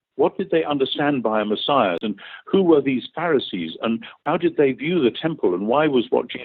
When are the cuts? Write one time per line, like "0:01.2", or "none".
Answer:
0:02.0
0:04.2